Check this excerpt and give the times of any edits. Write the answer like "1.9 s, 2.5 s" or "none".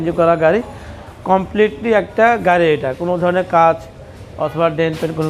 none